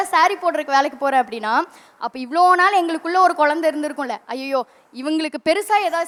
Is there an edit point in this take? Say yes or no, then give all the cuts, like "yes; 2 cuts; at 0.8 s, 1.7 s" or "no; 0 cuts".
no; 0 cuts